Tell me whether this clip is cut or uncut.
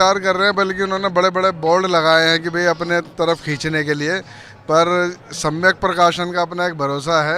uncut